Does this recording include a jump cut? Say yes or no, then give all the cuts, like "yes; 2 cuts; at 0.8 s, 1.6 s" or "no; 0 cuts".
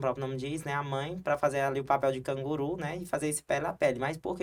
no; 0 cuts